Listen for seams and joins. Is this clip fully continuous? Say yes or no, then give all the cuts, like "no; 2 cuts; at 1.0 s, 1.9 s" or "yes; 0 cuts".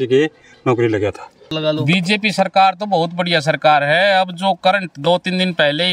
no; 1 cut; at 1.5 s